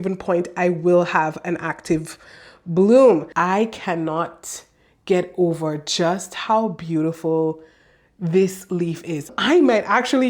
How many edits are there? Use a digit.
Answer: 2